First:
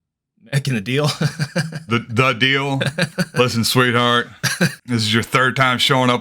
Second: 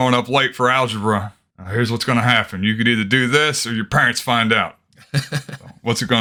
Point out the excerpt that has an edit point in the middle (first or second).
first